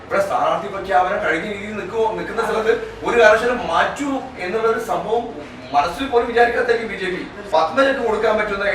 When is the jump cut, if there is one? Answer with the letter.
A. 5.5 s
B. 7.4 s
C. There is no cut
B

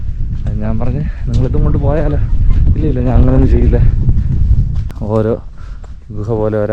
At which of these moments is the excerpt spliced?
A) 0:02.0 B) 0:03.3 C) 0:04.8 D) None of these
C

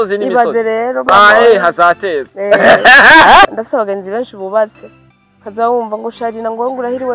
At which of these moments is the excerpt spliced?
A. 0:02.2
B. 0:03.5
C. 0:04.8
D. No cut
B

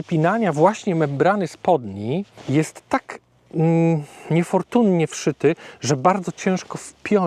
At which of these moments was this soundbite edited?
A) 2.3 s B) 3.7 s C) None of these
A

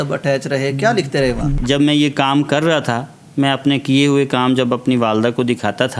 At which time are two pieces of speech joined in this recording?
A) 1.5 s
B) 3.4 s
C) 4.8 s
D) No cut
A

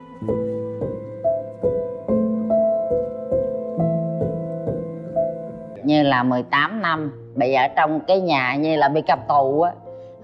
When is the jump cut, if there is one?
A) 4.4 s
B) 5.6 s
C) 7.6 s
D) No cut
B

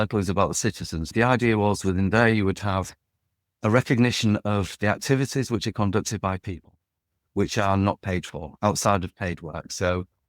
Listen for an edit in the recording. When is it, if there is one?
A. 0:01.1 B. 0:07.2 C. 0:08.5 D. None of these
A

